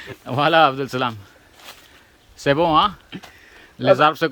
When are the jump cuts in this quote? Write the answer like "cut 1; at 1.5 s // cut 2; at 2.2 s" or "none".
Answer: none